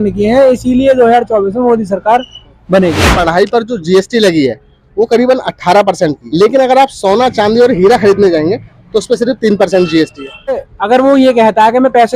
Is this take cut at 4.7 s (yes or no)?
no